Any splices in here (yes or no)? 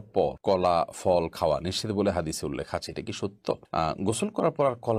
no